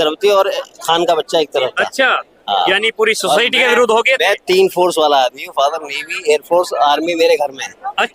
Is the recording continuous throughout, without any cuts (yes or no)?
yes